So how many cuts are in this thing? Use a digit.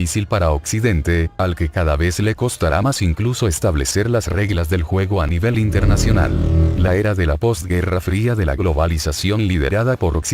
1